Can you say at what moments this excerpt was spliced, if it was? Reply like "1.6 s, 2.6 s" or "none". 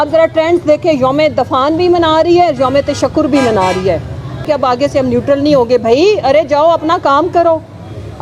4.4 s